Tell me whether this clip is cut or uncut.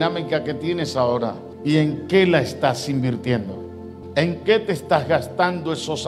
cut